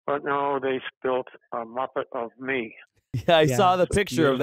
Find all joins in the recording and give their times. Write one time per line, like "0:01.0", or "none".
0:03.1